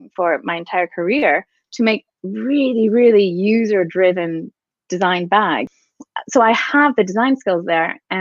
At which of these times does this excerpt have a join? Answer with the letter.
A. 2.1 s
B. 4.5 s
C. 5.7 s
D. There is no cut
C